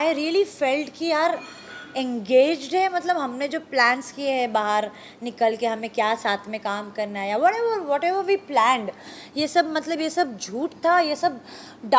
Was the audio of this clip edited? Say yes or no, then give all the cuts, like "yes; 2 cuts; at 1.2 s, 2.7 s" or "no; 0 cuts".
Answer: no; 0 cuts